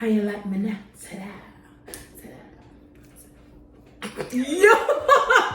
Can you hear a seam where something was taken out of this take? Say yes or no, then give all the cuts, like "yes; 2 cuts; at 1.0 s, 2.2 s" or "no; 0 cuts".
no; 0 cuts